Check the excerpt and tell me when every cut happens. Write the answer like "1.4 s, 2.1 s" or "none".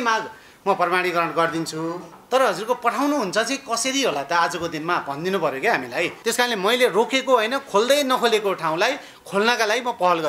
2.1 s, 6.1 s